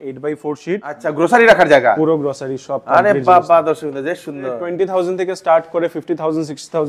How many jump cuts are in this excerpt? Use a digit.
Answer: 2